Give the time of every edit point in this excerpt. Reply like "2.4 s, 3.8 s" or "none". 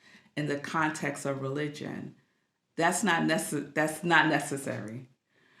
none